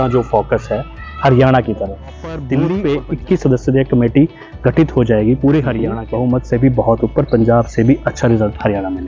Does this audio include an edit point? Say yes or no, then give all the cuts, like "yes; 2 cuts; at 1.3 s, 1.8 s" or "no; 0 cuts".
yes; 2 cuts; at 2.5 s, 6.0 s